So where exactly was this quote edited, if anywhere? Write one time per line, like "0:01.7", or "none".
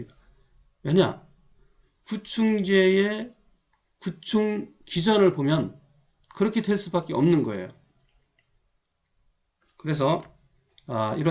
none